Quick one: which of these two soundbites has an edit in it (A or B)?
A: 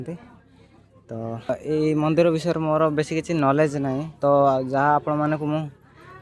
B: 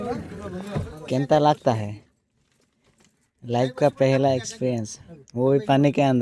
A